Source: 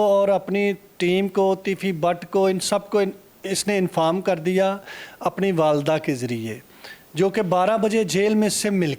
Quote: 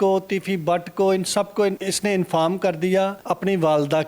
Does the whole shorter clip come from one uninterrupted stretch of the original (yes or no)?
no